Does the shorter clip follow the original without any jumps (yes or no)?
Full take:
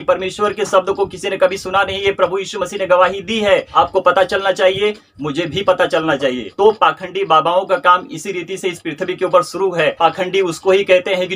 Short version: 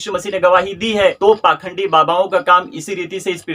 no